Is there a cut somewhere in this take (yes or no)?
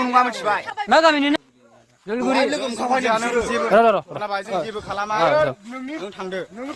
yes